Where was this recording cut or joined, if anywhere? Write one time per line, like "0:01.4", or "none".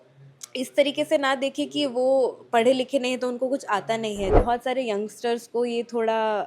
0:04.4